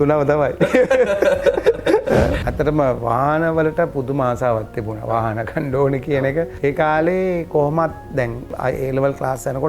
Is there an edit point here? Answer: yes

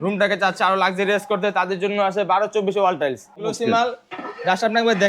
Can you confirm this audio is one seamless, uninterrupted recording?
no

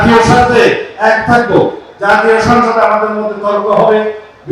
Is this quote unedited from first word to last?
yes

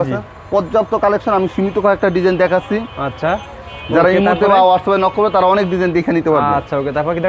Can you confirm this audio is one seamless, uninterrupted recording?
yes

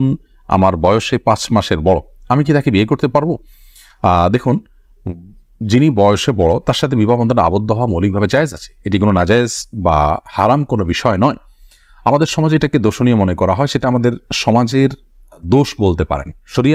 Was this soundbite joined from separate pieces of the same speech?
no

